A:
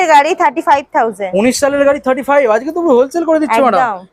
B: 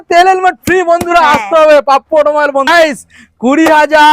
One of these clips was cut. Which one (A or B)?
B